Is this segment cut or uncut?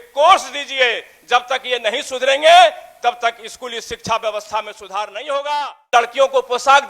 cut